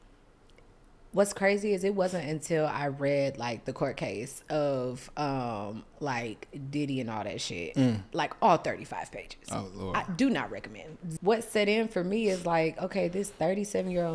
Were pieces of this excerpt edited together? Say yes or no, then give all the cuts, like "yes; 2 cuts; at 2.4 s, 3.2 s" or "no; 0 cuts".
yes; 1 cut; at 11.0 s